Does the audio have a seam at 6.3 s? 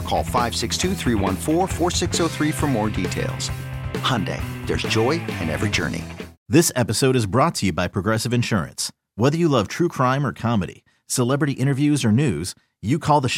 yes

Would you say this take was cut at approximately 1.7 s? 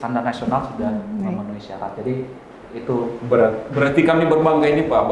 no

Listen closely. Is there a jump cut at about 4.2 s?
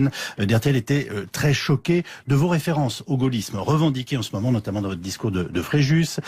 yes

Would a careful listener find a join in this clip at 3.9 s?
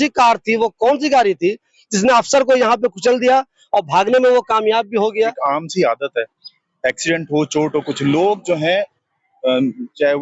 no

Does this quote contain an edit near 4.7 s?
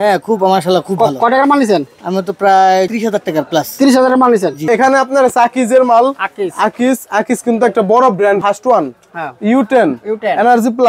yes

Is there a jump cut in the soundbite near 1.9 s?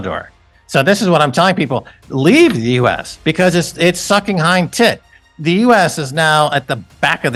no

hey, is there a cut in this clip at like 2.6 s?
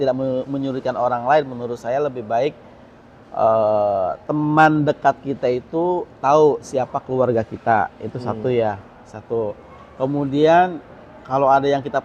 no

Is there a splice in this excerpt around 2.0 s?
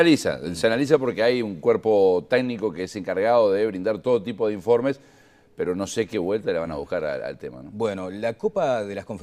yes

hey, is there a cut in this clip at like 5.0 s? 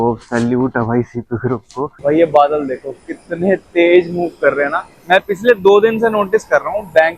no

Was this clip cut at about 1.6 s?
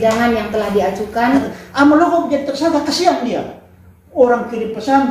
yes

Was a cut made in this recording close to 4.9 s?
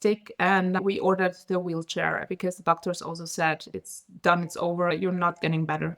yes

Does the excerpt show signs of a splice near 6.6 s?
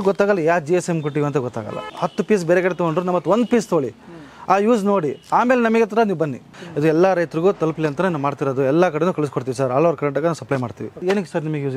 yes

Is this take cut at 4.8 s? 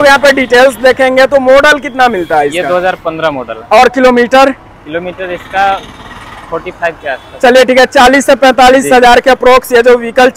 no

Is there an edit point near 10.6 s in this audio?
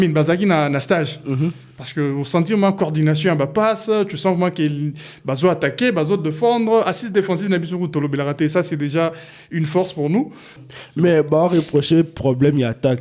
yes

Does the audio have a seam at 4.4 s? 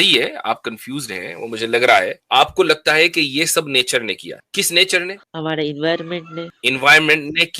yes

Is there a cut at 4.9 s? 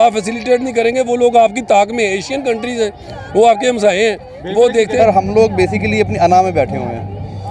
yes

